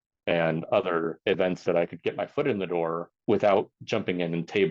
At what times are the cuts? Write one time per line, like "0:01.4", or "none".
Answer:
0:01.2
0:03.1
0:03.8

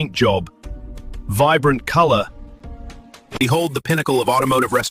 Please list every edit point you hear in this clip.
none

